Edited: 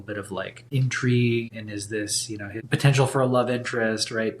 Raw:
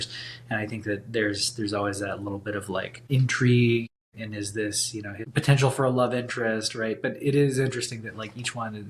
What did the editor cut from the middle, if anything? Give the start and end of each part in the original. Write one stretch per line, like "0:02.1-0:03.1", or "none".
0:04.4-0:04.6